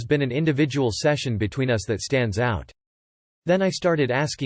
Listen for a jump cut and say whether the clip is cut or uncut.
uncut